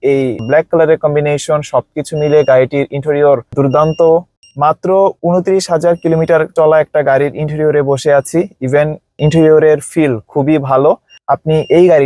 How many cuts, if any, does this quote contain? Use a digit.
1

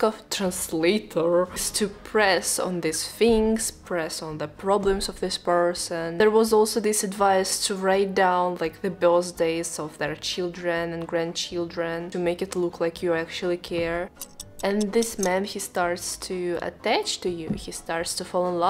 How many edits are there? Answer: 0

